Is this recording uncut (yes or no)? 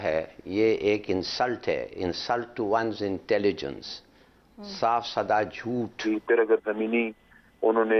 no